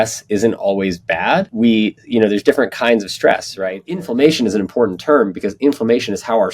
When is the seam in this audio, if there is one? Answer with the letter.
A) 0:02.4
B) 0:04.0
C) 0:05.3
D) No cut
B